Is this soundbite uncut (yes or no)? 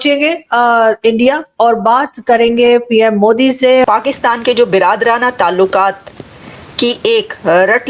no